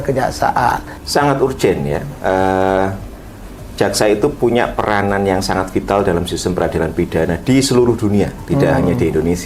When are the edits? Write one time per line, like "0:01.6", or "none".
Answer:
0:00.9